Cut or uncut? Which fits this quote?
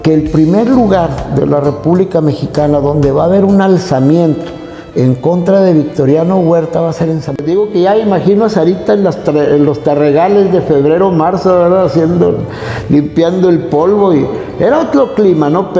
cut